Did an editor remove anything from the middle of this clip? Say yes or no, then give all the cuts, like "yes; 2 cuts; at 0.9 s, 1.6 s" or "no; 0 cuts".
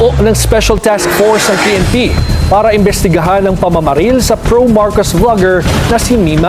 no; 0 cuts